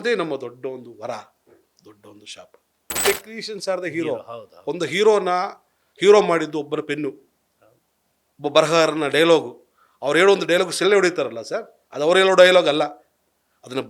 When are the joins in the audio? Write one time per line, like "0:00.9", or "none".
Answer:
0:02.8